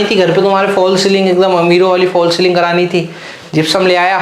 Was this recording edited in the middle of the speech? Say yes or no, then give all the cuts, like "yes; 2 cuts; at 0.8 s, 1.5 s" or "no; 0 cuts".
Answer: no; 0 cuts